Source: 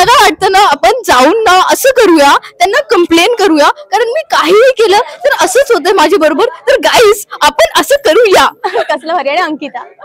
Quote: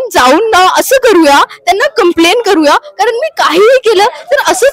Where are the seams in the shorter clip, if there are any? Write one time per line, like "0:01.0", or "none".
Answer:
none